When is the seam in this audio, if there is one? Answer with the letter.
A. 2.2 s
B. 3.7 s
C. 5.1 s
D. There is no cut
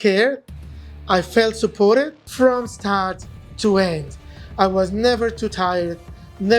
A